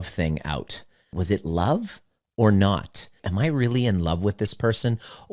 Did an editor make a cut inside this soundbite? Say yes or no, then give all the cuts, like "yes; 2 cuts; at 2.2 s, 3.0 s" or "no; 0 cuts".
yes; 2 cuts; at 1.1 s, 3.2 s